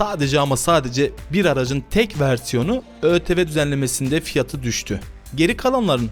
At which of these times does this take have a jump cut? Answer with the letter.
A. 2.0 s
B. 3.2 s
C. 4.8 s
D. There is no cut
D